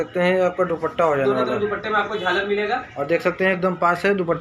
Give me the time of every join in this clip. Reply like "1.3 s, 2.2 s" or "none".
none